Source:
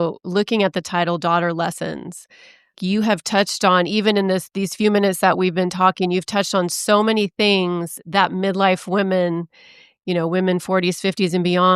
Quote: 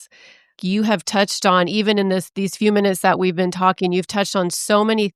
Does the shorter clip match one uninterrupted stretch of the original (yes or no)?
yes